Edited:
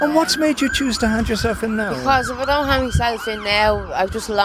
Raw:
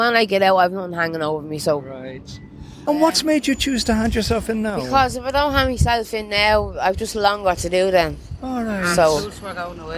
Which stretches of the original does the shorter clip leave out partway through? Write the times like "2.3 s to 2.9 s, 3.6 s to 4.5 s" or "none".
none

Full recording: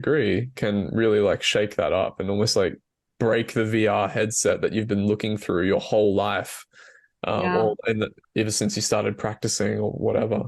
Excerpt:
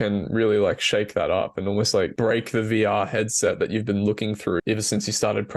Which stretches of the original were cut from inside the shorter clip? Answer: 2.8 s to 3.2 s, 5.6 s to 8.3 s

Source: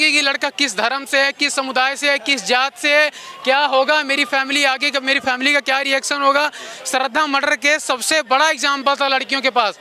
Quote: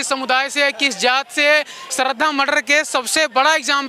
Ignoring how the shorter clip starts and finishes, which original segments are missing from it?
3.3 s to 6.7 s

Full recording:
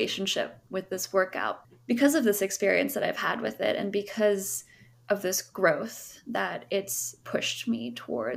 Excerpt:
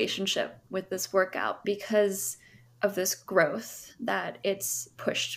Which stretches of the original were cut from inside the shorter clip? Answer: 1.6 s to 3.9 s

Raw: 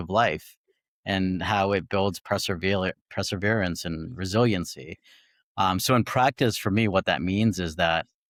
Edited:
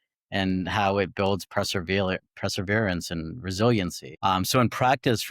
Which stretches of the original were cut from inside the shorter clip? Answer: 4.8 s to 5.4 s

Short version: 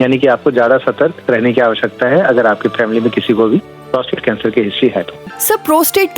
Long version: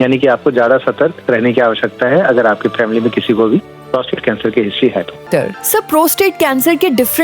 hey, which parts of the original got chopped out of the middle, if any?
5.2 s to 5.5 s

